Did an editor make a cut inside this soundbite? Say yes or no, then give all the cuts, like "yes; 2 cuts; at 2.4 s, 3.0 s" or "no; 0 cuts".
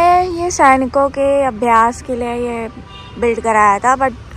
no; 0 cuts